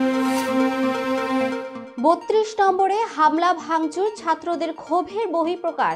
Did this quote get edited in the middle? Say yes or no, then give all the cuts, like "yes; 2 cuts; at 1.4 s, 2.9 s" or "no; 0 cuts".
no; 0 cuts